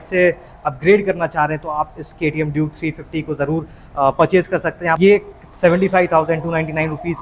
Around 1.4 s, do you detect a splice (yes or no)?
no